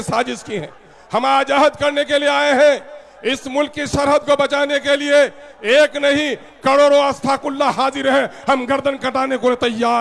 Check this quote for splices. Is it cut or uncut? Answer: uncut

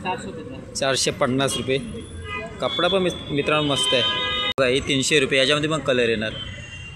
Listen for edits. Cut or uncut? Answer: cut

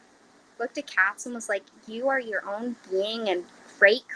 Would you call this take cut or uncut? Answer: uncut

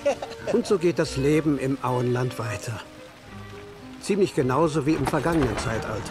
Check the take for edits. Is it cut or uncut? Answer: uncut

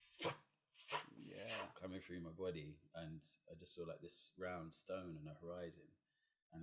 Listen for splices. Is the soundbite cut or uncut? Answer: uncut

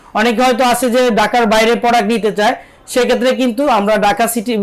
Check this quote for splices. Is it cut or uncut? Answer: uncut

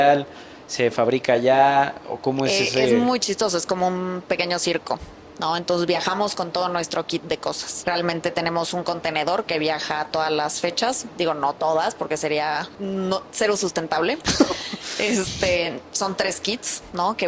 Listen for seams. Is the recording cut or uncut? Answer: cut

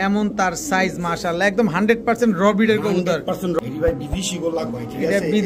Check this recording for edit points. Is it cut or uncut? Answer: cut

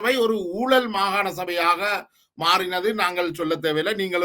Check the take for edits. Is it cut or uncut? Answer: uncut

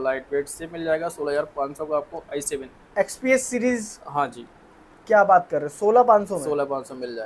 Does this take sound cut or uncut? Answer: uncut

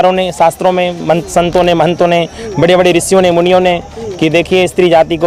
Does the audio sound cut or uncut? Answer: uncut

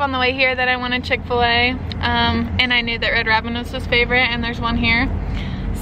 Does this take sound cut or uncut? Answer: uncut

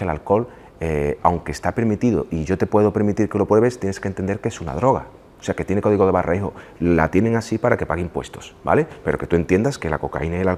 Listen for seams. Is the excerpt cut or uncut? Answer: uncut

